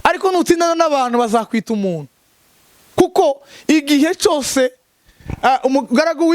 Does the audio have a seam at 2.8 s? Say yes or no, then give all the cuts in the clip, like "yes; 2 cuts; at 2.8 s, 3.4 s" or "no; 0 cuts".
no; 0 cuts